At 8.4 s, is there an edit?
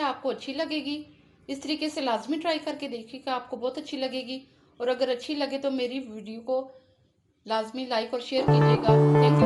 yes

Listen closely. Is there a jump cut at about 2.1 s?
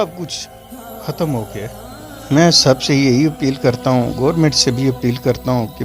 yes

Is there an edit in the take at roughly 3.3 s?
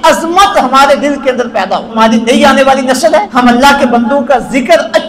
yes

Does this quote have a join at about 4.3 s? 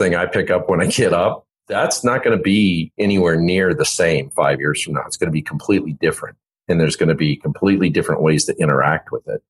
no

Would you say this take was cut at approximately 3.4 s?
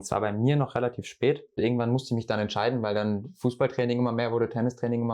no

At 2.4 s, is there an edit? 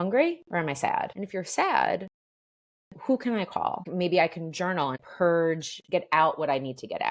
no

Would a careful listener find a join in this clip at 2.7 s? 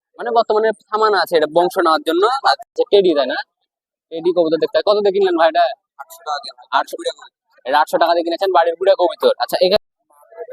yes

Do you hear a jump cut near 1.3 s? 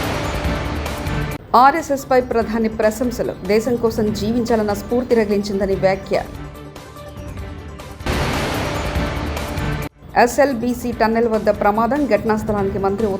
yes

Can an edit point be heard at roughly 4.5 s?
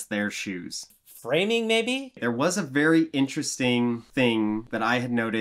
yes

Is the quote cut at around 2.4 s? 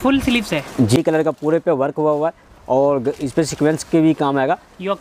no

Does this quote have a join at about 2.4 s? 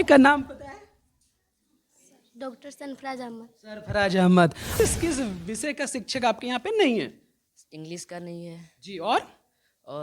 no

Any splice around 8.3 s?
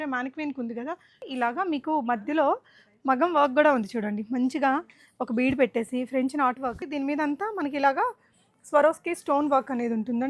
no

